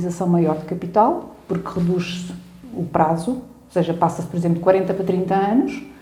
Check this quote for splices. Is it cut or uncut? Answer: uncut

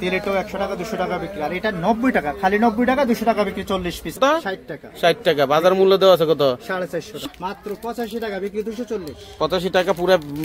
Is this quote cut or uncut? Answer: cut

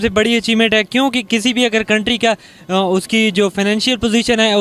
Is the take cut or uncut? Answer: uncut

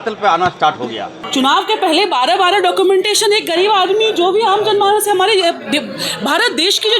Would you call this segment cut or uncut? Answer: cut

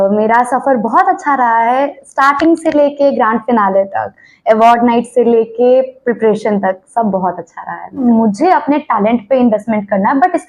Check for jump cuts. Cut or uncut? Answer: cut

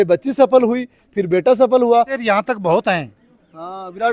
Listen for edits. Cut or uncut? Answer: cut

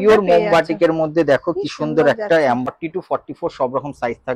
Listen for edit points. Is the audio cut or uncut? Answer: cut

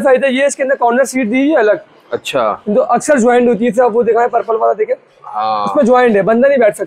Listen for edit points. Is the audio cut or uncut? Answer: uncut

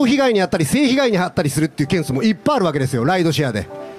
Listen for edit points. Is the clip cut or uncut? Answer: uncut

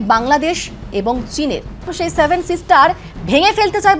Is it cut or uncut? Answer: cut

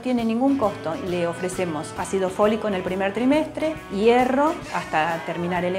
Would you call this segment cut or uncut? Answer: cut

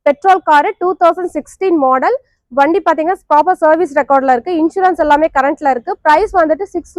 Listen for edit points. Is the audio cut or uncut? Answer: uncut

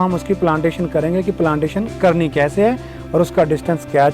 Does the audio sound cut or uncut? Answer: uncut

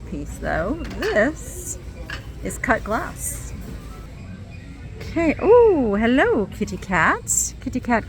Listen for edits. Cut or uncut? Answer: cut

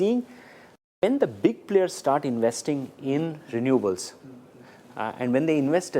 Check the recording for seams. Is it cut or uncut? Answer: uncut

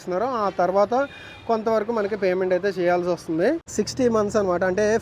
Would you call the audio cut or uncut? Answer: cut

